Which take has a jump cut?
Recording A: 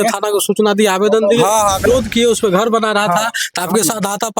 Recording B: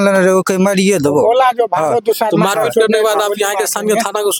A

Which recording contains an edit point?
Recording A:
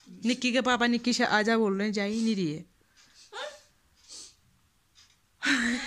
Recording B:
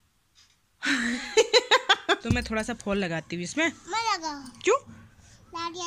B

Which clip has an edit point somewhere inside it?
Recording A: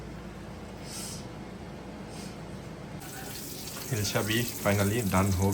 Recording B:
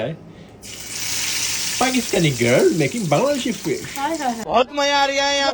A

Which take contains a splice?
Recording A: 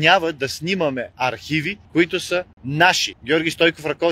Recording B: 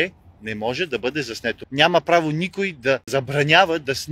B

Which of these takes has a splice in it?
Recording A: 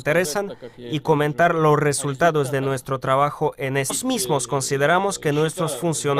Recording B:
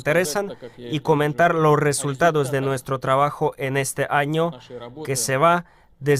B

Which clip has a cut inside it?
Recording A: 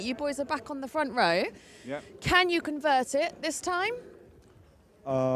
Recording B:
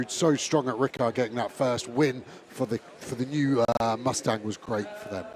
B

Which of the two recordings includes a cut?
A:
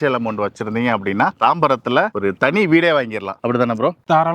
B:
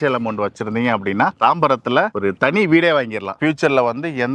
B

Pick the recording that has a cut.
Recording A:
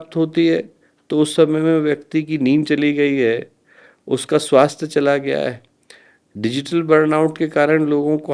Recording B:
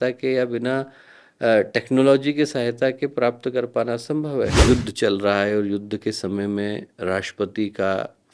B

